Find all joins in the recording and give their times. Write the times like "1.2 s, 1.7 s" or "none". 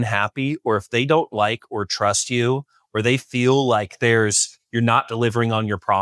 none

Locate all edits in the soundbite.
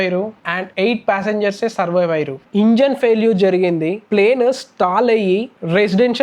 2.4 s

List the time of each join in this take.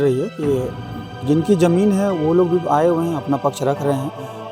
none

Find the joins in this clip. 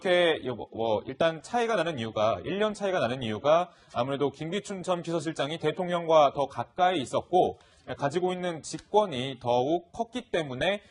8.3 s

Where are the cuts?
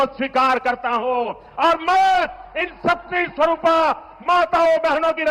none

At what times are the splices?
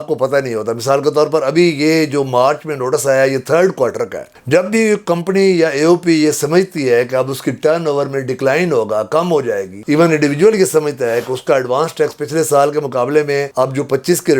4.3 s

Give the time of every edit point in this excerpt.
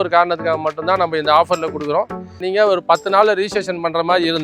2.4 s

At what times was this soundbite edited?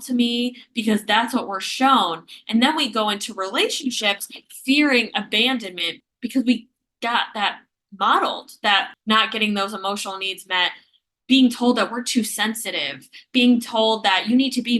6.0 s, 8.9 s

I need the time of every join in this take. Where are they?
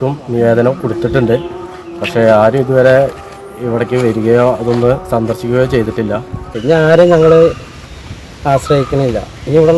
6.5 s

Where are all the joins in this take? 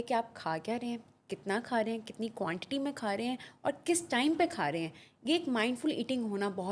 none

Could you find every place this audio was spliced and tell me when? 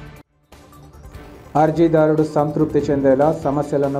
1.1 s

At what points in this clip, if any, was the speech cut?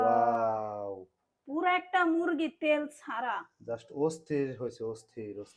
none

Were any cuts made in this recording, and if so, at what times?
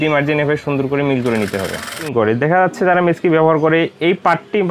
2.1 s

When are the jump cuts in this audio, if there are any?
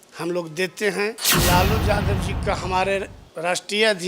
1.3 s

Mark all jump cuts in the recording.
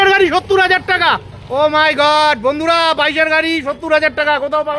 none

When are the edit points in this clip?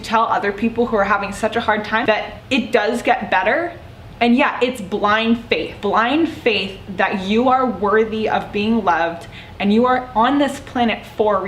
2.1 s, 5.7 s

